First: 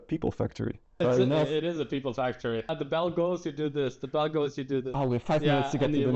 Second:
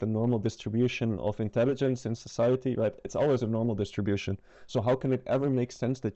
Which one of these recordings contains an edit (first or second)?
first